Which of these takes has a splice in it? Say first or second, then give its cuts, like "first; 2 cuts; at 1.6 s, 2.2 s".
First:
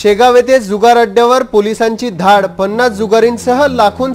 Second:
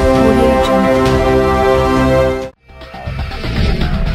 second; 1 cut; at 2.3 s